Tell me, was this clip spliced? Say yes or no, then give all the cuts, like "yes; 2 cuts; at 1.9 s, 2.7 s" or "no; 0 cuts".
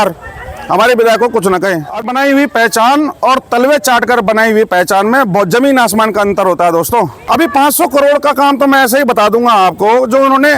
yes; 2 cuts; at 1.9 s, 7.2 s